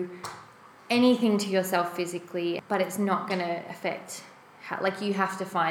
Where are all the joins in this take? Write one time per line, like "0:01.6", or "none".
0:02.6